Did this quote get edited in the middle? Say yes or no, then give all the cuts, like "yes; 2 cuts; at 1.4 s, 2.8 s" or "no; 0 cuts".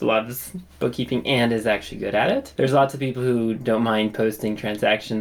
yes; 1 cut; at 2.5 s